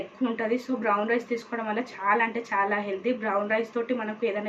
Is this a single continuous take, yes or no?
yes